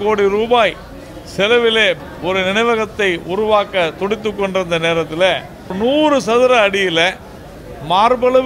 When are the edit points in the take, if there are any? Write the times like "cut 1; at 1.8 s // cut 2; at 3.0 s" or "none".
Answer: cut 1; at 2.0 s // cut 2; at 5.7 s